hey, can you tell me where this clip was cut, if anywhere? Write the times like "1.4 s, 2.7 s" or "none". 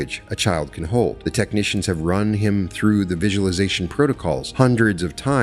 1.2 s, 4.5 s